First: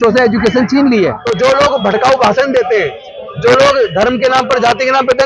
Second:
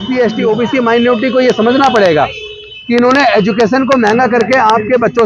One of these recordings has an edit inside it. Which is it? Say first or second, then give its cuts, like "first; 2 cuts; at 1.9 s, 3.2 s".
first; 1 cut; at 1.2 s